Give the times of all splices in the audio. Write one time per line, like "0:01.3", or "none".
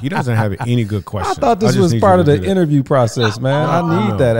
none